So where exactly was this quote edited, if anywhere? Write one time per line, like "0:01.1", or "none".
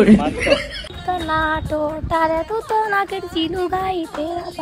0:01.0